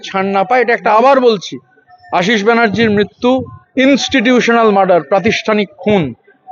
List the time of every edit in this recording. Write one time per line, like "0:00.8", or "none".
none